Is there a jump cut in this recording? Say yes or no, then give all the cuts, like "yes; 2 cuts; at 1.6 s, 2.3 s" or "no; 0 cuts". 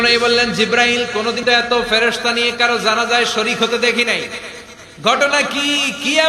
yes; 1 cut; at 1.4 s